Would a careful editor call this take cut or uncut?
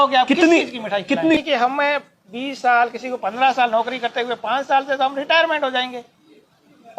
cut